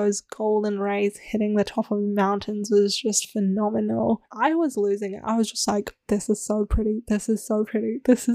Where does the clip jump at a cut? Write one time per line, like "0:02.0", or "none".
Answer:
0:04.3
0:06.0